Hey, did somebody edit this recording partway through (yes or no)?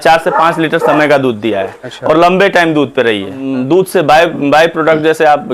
yes